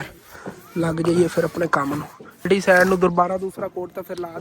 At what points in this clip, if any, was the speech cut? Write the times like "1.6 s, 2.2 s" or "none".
2.5 s